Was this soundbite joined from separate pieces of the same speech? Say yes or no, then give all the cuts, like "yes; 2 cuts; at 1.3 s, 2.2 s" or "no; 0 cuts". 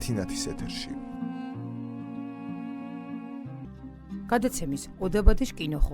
yes; 1 cut; at 3.8 s